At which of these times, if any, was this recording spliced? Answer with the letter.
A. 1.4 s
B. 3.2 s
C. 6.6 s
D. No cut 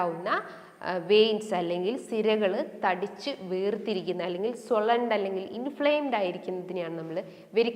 D